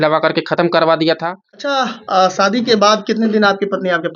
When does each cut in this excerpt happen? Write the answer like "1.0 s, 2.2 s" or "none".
1.7 s